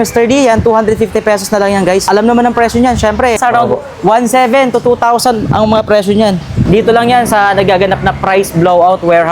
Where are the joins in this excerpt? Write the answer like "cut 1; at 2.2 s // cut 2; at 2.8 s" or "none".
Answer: cut 1; at 2.0 s // cut 2; at 3.4 s // cut 3; at 6.5 s

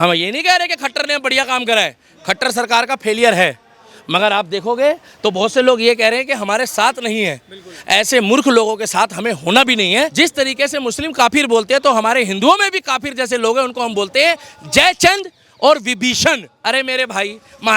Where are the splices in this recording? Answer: cut 1; at 10.1 s // cut 2; at 16.5 s

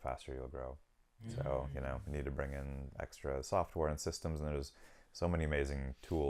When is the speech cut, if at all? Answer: none

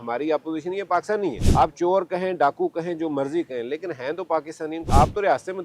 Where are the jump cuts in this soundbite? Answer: cut 1; at 1.4 s // cut 2; at 4.9 s

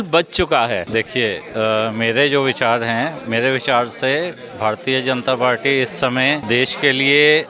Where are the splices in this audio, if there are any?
cut 1; at 0.9 s // cut 2; at 6.4 s

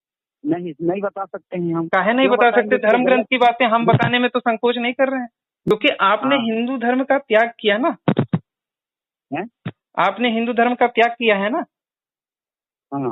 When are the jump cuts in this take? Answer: cut 1; at 5.7 s

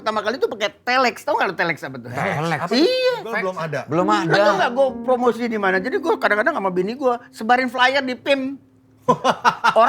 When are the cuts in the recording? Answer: cut 1; at 3.6 s

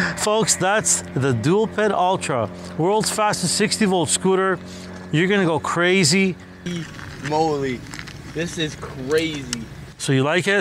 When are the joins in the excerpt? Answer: cut 1; at 6.6 s

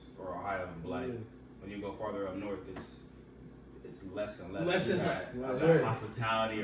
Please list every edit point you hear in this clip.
none

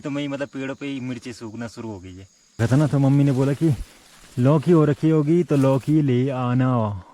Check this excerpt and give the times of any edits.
cut 1; at 2.6 s

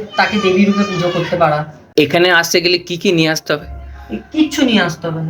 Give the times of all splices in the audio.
cut 1; at 1.8 s

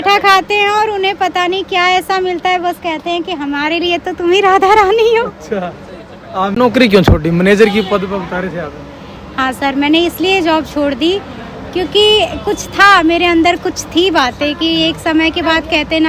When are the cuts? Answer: cut 1; at 6.5 s

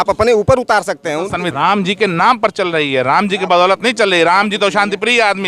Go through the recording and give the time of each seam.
cut 1; at 1.5 s

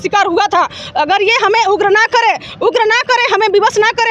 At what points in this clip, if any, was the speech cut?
none

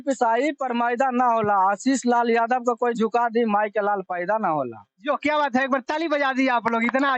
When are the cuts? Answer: none

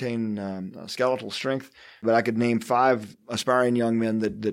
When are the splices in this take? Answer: cut 1; at 2.0 s // cut 2; at 3.2 s

